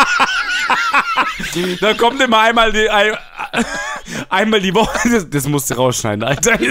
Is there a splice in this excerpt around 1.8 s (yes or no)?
no